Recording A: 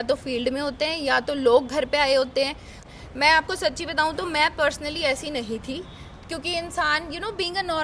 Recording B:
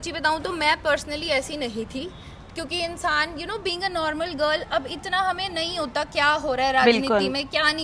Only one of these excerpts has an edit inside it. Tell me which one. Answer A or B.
A